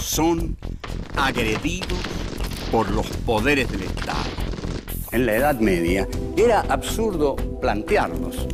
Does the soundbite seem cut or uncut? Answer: uncut